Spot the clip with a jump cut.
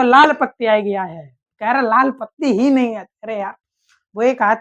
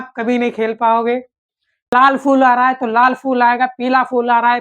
second; 1 cut; at 1.9 s

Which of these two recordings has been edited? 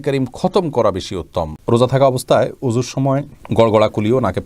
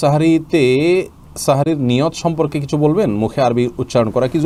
first; 2 cuts; at 1.6 s, 3.4 s

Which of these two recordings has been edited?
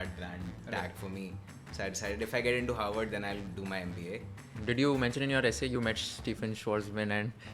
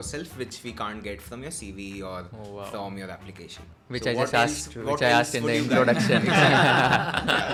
first; 1 cut; at 4.5 s

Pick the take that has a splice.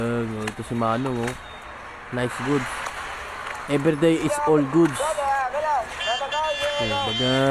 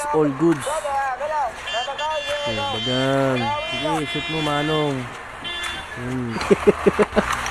second; 1 cut; at 6.4 s

